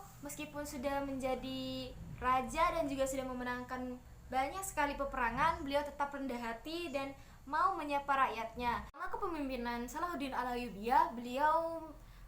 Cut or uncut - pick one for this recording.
cut